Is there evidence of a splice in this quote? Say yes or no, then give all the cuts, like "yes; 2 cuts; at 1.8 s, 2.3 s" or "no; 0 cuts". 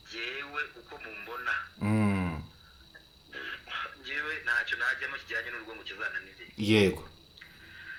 no; 0 cuts